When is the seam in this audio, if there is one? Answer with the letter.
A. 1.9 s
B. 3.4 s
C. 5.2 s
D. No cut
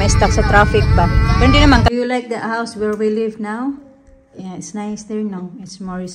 A